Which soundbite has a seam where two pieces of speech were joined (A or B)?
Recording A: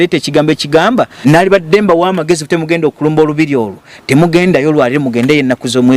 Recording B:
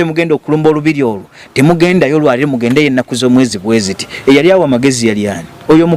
A